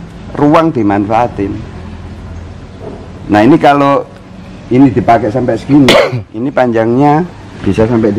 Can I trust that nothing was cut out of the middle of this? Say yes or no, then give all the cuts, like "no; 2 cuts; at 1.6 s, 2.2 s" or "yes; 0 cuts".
yes; 0 cuts